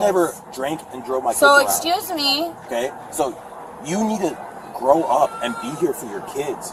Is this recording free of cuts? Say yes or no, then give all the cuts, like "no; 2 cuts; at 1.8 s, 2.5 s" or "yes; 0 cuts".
yes; 0 cuts